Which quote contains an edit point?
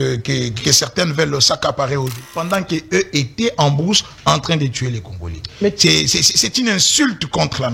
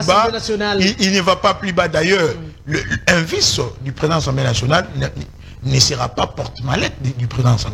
first; 1 cut; at 2.2 s

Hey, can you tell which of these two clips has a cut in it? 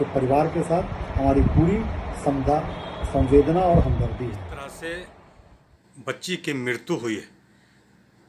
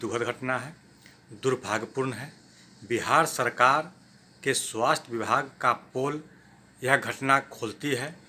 first; 1 cut; at 4.4 s

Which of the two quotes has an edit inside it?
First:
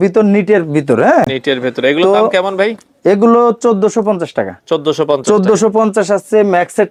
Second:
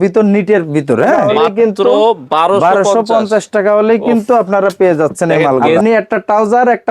second; 2 cuts; at 1.3 s, 5.8 s

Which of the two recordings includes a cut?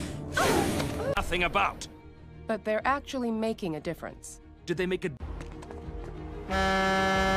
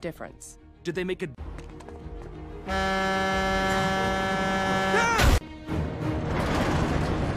second; 1 cut; at 5.6 s

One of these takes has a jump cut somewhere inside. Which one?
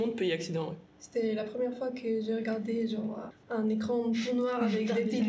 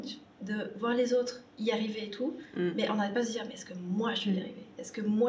first; 2 cuts; at 1.0 s, 3.3 s

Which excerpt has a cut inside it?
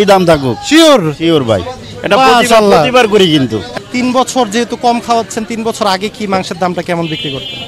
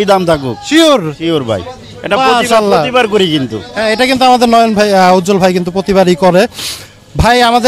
first; 1 cut; at 3.6 s

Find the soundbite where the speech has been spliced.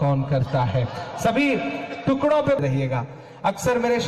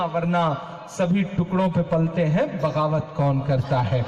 first; 1 cut; at 2.6 s

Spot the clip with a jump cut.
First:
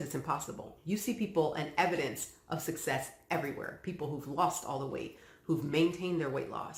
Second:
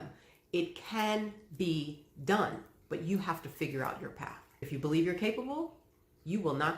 second; 1 cut; at 4.7 s

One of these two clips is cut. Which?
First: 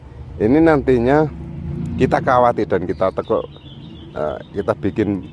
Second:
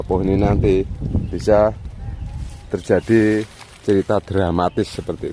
first; 1 cut; at 1.6 s

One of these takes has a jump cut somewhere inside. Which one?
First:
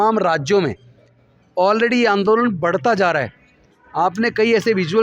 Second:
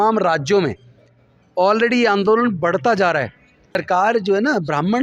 second; 1 cut; at 3.8 s

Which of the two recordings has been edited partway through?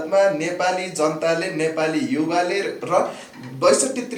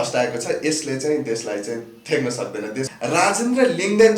second; 1 cut; at 2.9 s

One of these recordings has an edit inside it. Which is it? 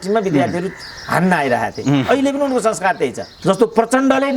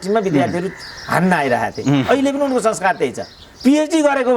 first; 1 cut; at 3.3 s

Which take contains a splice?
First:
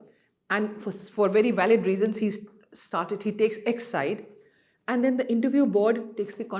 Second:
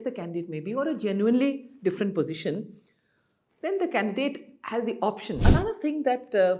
second; 1 cut; at 5.4 s

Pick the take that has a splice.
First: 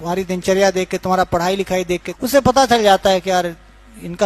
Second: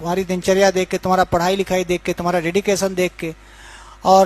first; 1 cut; at 2.1 s

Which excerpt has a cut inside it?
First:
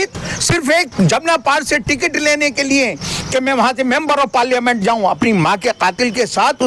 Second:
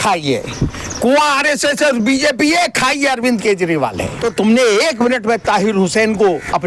second; 1 cut; at 4.1 s

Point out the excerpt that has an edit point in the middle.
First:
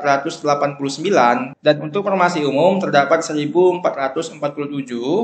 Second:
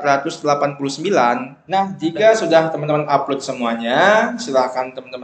second; 1 cut; at 1.5 s

